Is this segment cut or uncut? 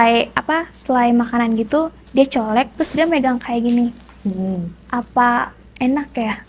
uncut